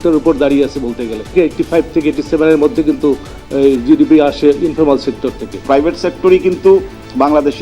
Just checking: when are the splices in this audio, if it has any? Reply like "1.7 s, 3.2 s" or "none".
1.3 s, 5.6 s